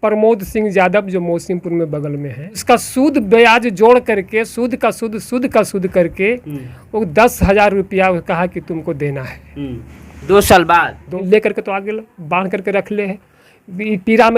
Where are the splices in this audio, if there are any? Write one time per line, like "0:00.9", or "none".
0:02.6
0:11.2